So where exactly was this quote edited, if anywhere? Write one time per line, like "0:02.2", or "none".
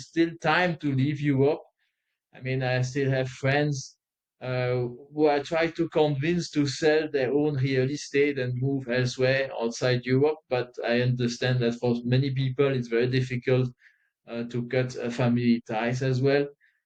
none